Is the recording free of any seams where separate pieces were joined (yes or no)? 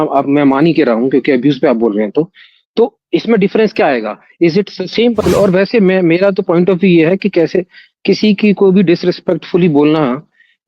no